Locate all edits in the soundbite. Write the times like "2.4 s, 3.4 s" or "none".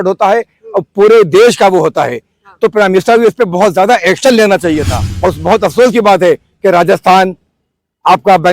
5.1 s